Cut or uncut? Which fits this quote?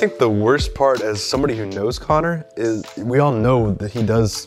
uncut